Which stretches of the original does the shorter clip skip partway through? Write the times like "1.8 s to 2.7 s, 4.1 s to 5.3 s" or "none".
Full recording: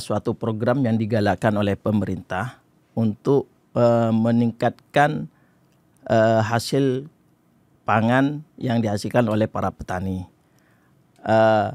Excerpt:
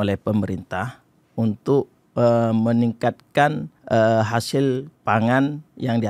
5.3 s to 5.9 s, 7.1 s to 7.7 s